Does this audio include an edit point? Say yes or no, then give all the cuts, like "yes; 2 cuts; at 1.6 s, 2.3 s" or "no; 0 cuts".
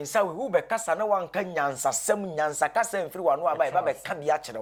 no; 0 cuts